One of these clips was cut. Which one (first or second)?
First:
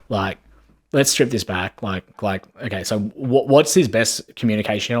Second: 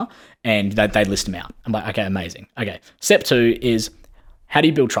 first